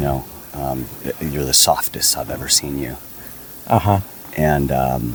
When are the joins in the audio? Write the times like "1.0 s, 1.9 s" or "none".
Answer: none

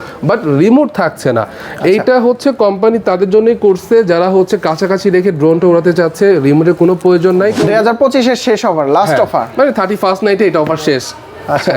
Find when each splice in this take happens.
7.6 s

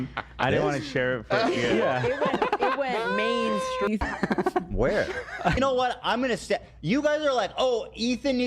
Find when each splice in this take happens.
5.6 s

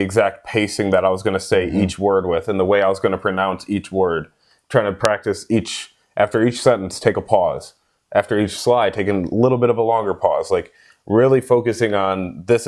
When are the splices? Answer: none

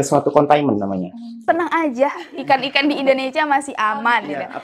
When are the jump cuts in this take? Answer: 1.4 s

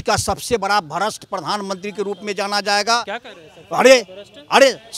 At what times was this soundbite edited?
none

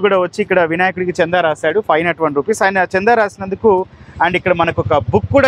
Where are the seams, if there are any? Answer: none

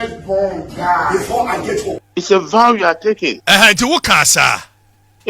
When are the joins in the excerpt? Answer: 2.0 s, 3.4 s

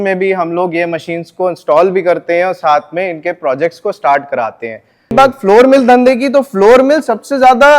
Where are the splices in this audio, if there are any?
5.1 s

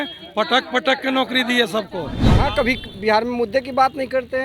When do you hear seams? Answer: 2.2 s

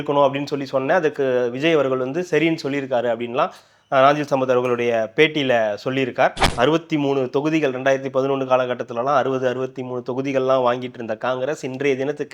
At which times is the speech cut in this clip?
6.4 s

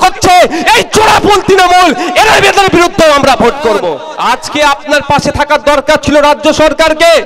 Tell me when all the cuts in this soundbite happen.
4.1 s

